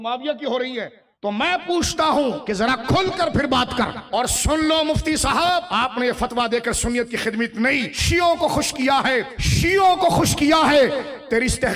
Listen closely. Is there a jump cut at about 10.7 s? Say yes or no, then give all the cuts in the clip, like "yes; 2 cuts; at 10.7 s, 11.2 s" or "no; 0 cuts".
no; 6 cuts; at 1.0 s, 2.4 s, 4.0 s, 5.7 s, 8.0 s, 9.4 s